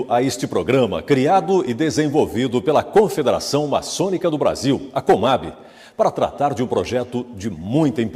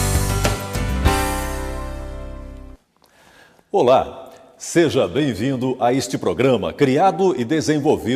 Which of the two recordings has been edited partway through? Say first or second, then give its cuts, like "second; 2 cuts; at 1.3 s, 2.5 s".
second; 1 cut; at 3.0 s